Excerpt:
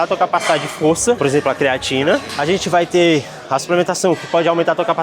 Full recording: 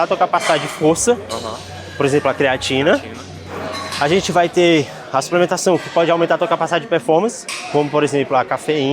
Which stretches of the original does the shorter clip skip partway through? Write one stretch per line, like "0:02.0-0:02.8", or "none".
0:01.2-0:02.0
0:03.1-0:03.9